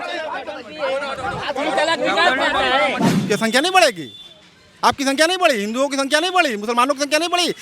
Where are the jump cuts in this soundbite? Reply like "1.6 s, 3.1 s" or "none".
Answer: 3.1 s